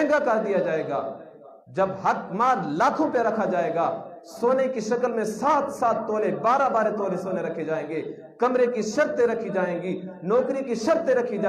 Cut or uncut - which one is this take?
uncut